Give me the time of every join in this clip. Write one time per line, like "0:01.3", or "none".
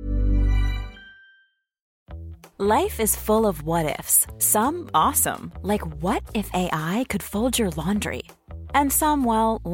0:01.9